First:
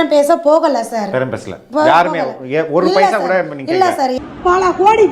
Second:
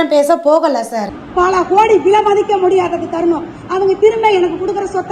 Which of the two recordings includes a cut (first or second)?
first